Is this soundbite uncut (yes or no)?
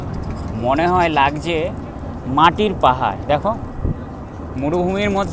yes